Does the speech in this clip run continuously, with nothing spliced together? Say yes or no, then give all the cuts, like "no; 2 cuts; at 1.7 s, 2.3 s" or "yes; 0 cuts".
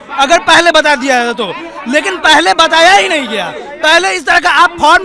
yes; 0 cuts